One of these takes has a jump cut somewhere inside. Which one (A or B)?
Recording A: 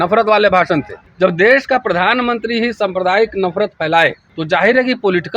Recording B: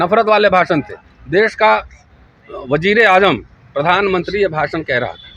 A